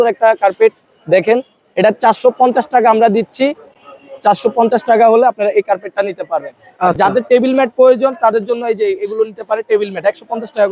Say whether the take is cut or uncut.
uncut